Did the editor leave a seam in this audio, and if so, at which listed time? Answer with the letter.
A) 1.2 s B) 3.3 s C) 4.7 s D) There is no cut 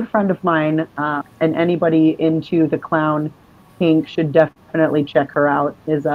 A